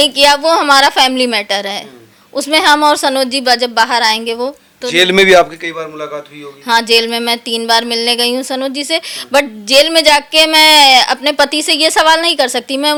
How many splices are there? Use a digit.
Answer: 0